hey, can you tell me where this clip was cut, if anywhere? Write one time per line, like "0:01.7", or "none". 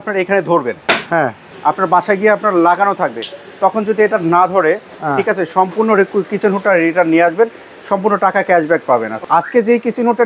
0:01.4
0:09.2